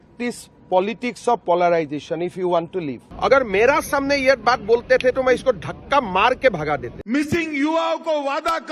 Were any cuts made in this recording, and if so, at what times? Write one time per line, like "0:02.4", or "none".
0:03.0
0:06.9